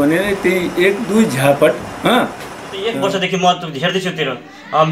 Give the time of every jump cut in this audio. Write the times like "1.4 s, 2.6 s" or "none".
2.8 s

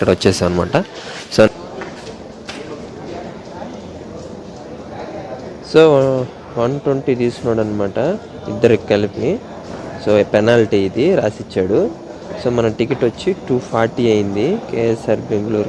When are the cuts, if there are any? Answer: 1.5 s

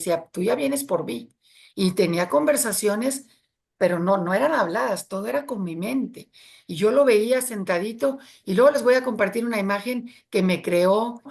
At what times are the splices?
none

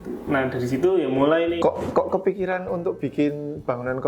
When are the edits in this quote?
1.6 s

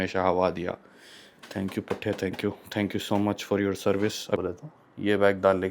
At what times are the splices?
4.4 s

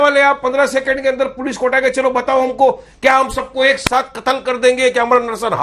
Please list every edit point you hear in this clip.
none

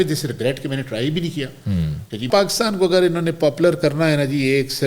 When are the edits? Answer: 2.3 s

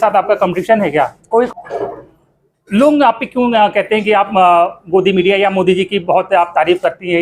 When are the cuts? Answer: 1.5 s

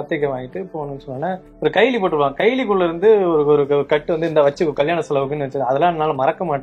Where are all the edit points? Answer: 1.5 s

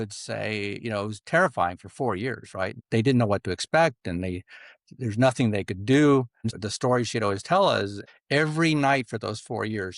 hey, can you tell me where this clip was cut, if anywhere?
2.8 s, 6.5 s, 8.1 s

